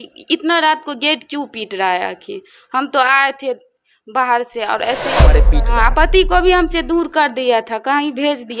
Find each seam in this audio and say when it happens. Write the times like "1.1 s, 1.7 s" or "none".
5.4 s